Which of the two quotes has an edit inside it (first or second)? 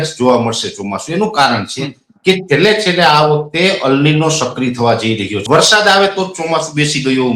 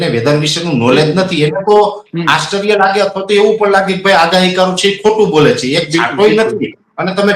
first